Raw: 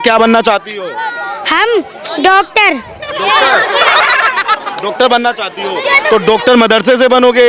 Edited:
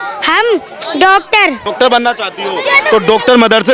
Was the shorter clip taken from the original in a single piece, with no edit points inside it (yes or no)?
no